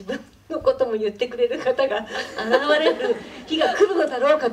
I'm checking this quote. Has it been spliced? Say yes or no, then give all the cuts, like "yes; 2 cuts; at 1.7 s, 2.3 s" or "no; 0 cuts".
no; 0 cuts